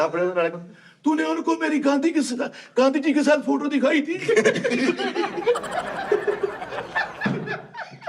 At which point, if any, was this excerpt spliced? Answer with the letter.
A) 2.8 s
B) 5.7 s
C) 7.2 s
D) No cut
D